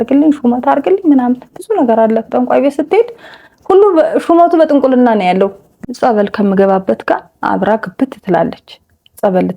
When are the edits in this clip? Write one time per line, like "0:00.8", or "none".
0:05.6